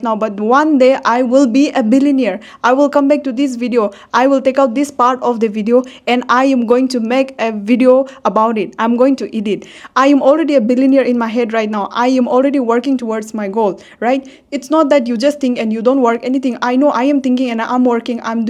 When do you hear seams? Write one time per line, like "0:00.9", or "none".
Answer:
none